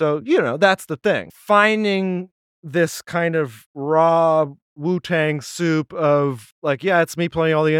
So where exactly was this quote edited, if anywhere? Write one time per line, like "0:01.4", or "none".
0:01.3
0:03.7
0:04.7
0:06.5